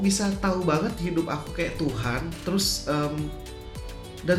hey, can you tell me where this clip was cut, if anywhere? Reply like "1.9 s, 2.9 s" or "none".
none